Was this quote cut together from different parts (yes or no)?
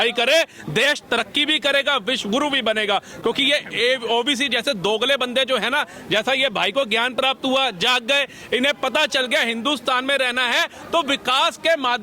no